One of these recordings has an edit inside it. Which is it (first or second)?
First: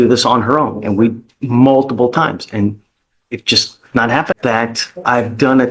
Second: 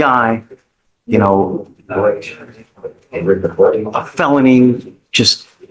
first